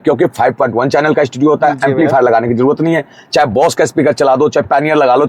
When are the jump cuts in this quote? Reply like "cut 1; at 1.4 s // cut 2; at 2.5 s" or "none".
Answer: none